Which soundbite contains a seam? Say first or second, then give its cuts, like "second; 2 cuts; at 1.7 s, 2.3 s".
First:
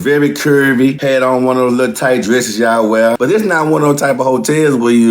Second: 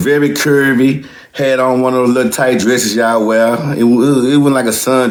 first; 2 cuts; at 1.0 s, 3.2 s